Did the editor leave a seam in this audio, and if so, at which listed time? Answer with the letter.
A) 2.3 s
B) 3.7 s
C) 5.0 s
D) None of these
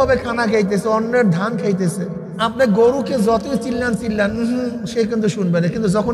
A